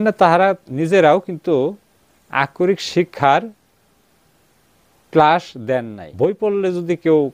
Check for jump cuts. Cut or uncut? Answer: cut